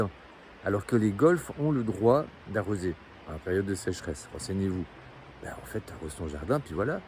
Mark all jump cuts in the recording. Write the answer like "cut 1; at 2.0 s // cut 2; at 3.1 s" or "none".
none